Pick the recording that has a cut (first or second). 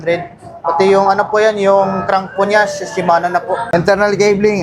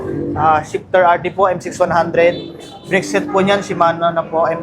first